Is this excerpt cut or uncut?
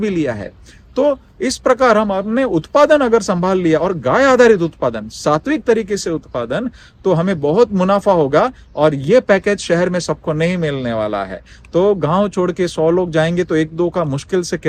uncut